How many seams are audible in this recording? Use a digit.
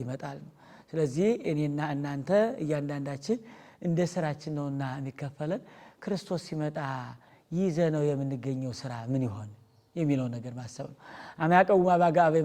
0